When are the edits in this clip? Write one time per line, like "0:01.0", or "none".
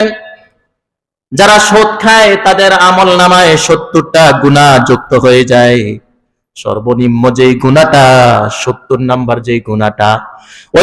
none